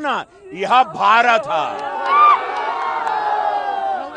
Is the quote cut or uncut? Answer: uncut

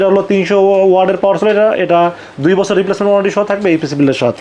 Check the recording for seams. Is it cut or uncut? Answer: uncut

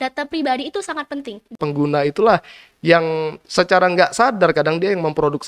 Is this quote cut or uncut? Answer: cut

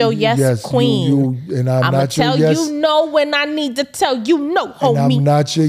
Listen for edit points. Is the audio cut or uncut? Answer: uncut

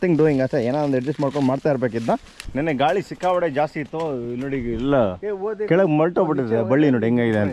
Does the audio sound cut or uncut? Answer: cut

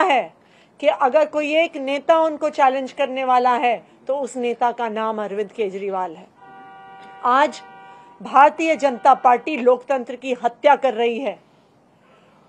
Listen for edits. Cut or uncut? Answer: uncut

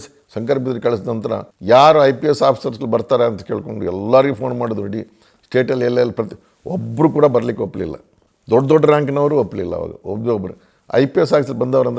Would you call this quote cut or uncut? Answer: uncut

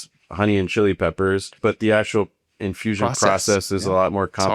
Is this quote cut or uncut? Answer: cut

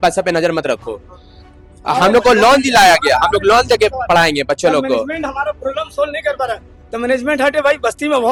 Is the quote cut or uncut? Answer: uncut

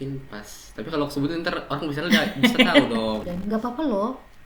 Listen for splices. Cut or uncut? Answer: cut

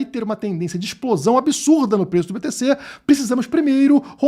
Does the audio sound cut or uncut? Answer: uncut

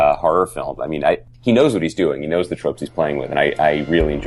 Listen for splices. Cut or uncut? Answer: cut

